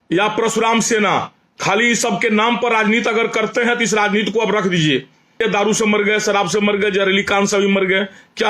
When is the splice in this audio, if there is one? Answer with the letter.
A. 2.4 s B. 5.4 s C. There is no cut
B